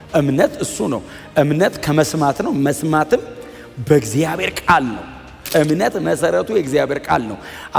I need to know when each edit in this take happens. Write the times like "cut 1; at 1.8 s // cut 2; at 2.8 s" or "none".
cut 1; at 5.3 s